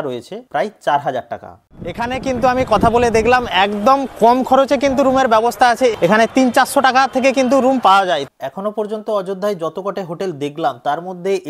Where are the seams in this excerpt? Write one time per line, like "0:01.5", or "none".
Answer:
0:02.0
0:05.9
0:08.2